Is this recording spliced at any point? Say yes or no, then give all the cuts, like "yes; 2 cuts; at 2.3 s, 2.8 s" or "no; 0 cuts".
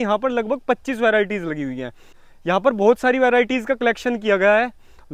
no; 0 cuts